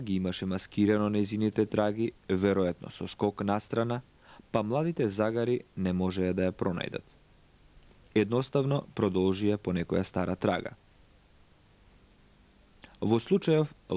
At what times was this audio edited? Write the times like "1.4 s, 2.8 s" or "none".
12.4 s